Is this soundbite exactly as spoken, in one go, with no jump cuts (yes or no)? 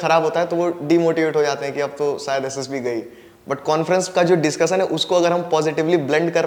yes